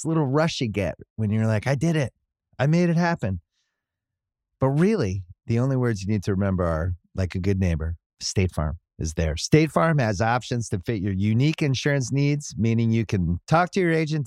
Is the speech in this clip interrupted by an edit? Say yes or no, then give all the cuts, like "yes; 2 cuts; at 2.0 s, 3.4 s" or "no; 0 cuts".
no; 0 cuts